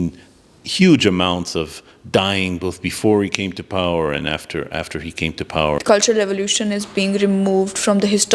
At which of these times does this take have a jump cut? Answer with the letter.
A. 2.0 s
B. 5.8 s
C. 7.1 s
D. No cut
B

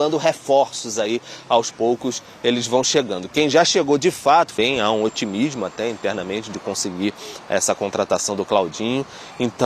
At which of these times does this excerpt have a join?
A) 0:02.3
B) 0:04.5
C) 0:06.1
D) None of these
B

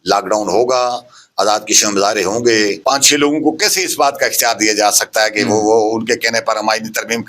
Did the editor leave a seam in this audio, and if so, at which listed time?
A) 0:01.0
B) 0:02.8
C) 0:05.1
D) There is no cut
B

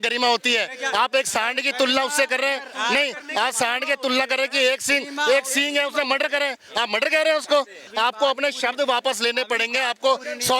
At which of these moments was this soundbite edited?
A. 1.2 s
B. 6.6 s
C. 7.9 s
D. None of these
C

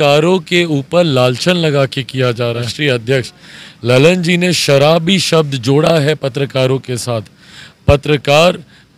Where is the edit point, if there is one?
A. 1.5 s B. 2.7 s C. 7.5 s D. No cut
B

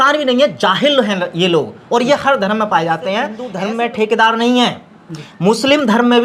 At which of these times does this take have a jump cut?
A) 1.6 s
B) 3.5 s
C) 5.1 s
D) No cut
B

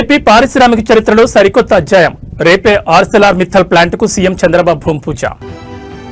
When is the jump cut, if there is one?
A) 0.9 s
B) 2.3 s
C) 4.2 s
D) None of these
D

